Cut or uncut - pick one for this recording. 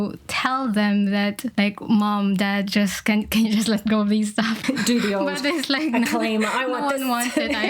cut